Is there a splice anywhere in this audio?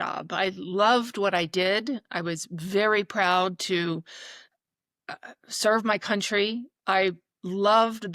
no; 0 cuts

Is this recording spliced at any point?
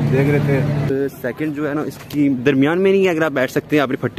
yes; 1 cut; at 0.9 s

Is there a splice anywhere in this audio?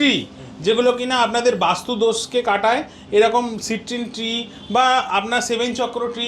no; 0 cuts

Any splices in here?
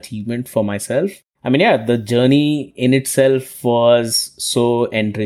yes; 1 cut; at 1.1 s

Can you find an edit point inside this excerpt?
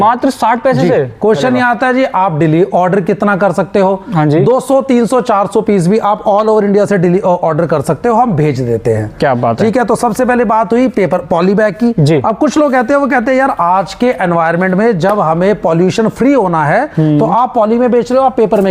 no; 0 cuts

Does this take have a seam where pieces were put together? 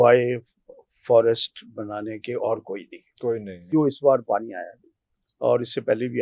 yes; 1 cut; at 3.7 s

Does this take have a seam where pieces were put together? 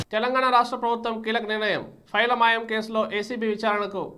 no; 0 cuts

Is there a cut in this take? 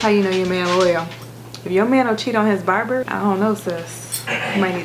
yes; 1 cut; at 3.1 s

